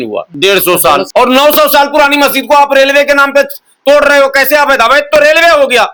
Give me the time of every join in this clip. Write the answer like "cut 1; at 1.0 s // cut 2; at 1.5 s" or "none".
none